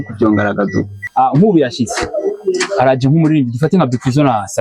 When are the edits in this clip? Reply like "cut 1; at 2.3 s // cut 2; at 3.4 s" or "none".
cut 1; at 1.0 s